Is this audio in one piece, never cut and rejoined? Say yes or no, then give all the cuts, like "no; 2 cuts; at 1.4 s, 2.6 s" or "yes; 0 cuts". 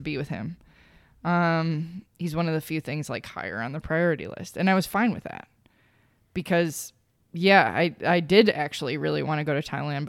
yes; 0 cuts